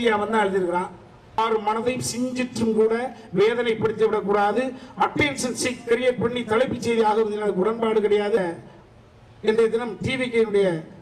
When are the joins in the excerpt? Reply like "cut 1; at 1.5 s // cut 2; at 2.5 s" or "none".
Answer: cut 1; at 1.4 s // cut 2; at 8.4 s